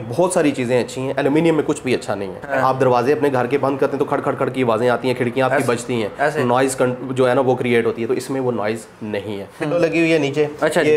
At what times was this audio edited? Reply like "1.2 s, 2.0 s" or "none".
2.4 s, 9.7 s

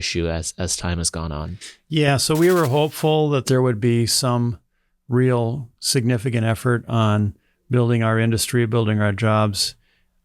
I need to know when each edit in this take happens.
3.5 s

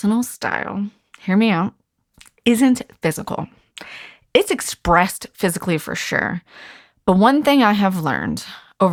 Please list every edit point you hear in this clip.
none

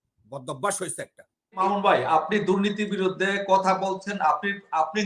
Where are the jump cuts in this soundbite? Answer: 1.6 s

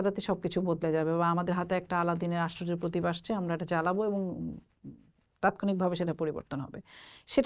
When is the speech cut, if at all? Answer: none

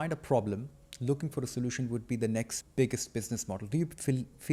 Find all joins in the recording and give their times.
2.6 s

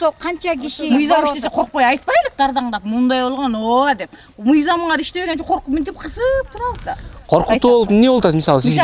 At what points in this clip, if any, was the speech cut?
none

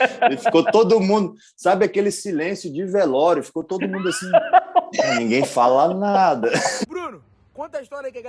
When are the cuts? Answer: 6.8 s

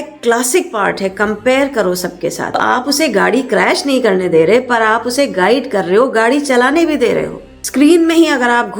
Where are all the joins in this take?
2.4 s, 7.6 s

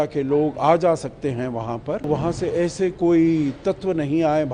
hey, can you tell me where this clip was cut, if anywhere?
2.1 s

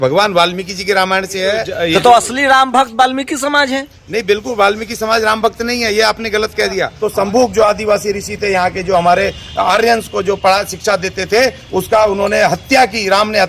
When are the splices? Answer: 1.7 s, 6.9 s

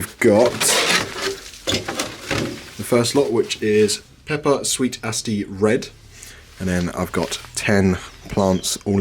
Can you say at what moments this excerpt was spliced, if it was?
none

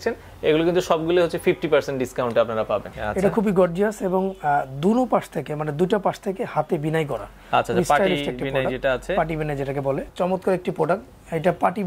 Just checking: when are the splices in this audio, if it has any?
3.0 s, 10.1 s

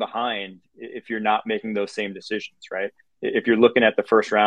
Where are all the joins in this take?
none

